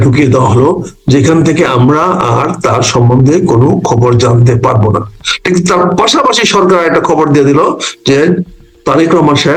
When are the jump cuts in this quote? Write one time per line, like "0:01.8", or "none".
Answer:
none